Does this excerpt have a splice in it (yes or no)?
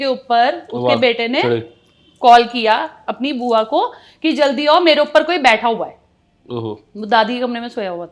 no